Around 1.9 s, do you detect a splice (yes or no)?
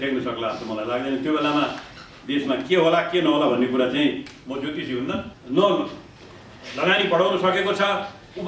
no